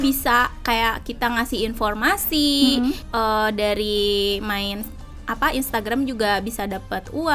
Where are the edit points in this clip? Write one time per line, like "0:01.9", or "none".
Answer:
0:03.0